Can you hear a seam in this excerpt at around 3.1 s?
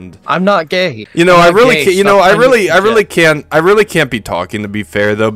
no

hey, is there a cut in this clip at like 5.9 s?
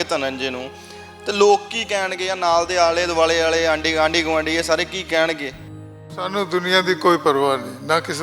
yes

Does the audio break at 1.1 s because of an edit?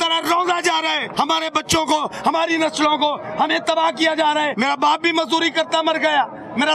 yes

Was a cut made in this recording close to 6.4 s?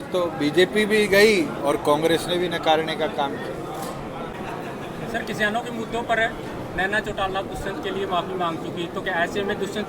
no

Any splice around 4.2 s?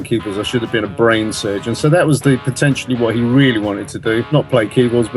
yes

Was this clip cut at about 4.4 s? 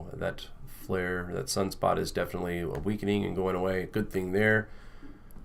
yes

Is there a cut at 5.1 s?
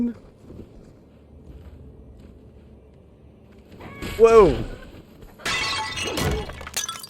no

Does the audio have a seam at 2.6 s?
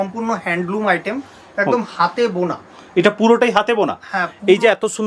no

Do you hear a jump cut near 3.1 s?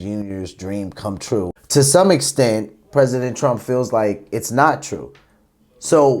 no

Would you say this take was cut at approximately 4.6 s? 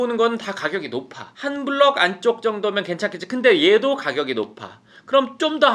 no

